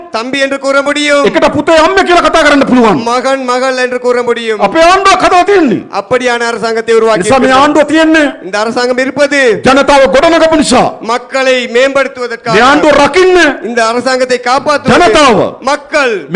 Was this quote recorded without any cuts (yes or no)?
yes